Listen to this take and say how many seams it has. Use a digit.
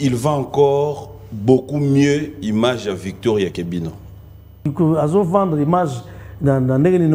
1